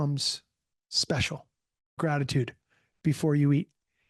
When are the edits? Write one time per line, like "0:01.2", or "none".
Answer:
0:02.0